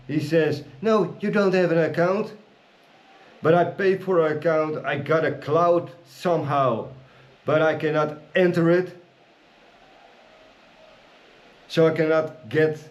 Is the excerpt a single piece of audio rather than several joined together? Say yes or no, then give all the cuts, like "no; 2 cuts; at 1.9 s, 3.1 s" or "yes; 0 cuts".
yes; 0 cuts